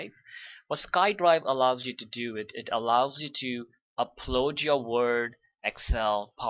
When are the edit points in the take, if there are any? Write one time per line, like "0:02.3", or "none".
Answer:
0:02.9